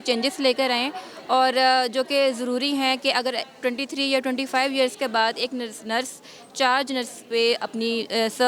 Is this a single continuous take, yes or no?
yes